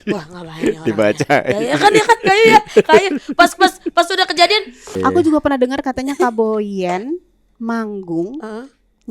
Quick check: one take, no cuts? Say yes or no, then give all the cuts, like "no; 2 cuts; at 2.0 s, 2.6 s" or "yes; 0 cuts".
no; 1 cut; at 4.9 s